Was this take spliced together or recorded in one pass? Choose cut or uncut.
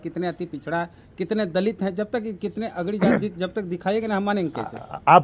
uncut